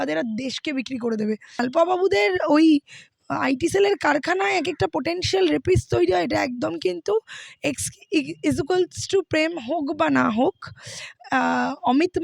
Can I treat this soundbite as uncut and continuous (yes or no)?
no